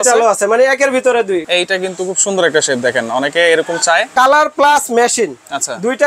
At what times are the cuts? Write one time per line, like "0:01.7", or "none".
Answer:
0:01.5
0:04.1